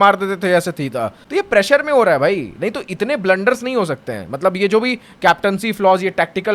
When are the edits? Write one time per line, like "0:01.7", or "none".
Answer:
0:01.2